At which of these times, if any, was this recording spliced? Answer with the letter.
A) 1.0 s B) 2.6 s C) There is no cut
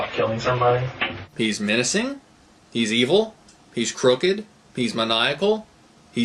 C